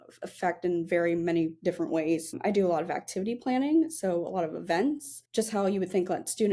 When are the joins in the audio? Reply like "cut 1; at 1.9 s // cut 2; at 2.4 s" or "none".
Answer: cut 1; at 2.3 s // cut 2; at 5.1 s

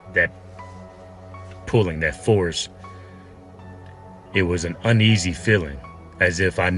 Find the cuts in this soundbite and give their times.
cut 1; at 3.0 s // cut 2; at 4.3 s

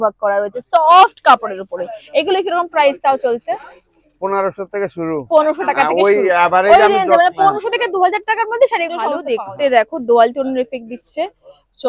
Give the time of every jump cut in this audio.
cut 1; at 9.3 s

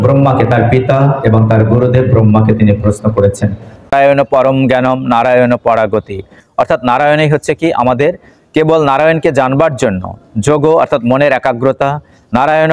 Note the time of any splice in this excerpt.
cut 1; at 3.9 s

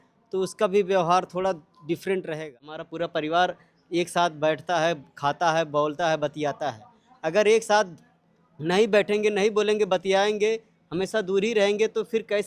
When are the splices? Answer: cut 1; at 2.8 s

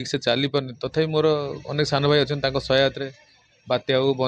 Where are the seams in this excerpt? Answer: none

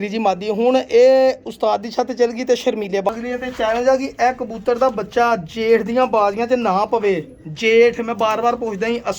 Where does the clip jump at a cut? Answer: cut 1; at 3.1 s

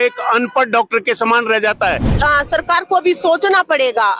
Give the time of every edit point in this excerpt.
cut 1; at 2.1 s

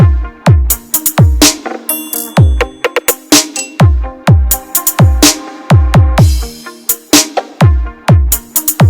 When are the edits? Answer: cut 1; at 6.1 s

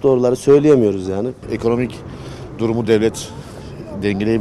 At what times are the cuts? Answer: cut 1; at 1.4 s

